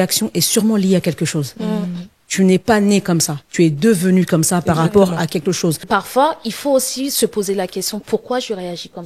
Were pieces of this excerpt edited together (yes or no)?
yes